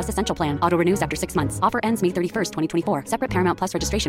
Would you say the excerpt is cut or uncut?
uncut